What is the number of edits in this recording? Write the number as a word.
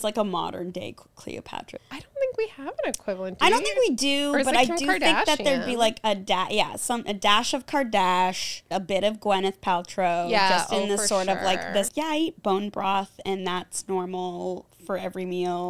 one